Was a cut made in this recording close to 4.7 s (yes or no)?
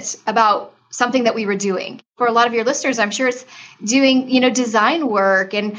no